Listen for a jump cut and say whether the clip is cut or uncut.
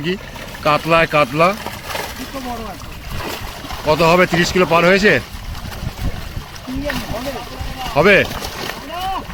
uncut